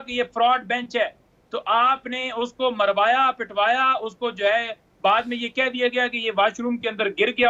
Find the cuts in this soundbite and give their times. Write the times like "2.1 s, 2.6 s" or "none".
none